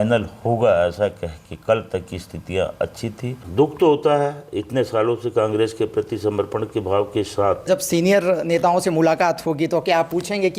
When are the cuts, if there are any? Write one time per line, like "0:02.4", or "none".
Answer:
0:03.4
0:07.6